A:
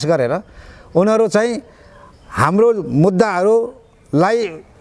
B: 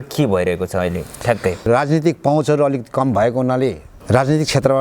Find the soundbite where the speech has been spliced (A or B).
B